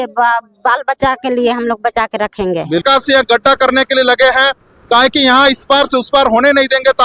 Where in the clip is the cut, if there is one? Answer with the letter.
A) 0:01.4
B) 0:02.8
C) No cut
B